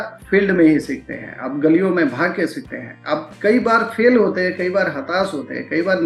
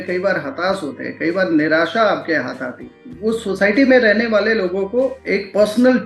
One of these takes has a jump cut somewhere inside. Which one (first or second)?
second